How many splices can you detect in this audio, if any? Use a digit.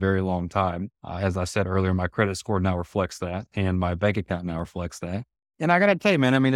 1